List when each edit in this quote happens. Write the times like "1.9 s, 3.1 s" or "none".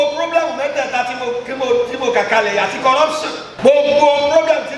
3.4 s